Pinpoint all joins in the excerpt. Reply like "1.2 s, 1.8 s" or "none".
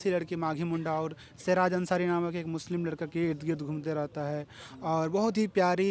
none

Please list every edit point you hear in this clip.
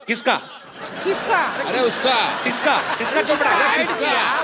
none

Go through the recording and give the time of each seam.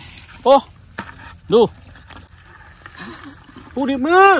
2.3 s

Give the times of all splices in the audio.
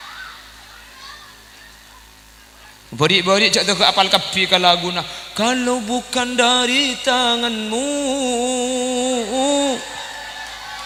none

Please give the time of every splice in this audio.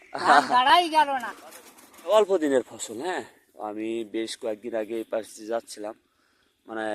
1.4 s

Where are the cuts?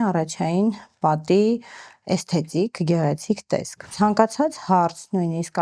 3.9 s

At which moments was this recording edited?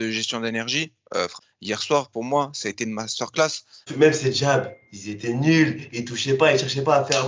1.3 s, 3.9 s

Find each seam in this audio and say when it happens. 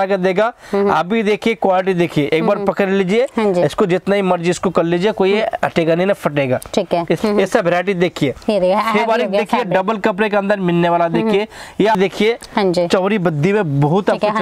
7.2 s, 12.0 s

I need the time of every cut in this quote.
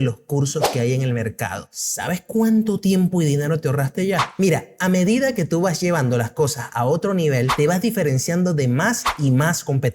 4.3 s

